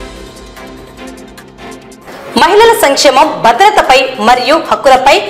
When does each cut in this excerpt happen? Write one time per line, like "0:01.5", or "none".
0:01.9

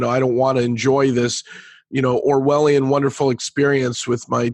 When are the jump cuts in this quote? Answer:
0:01.8

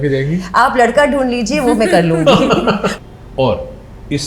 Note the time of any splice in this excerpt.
0:02.9

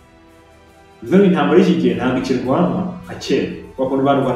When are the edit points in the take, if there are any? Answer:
0:01.1

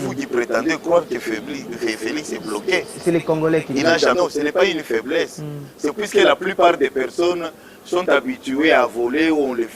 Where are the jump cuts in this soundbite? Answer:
0:04.1

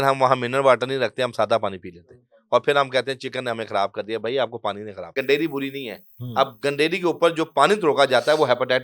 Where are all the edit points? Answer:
0:05.1

